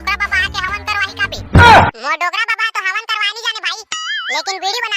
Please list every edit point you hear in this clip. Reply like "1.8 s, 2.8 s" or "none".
1.4 s, 2.0 s